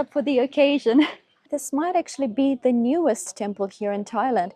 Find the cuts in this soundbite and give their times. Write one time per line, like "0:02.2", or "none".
0:01.5